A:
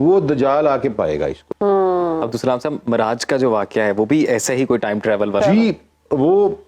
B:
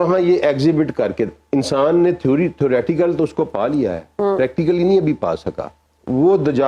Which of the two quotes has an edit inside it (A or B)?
A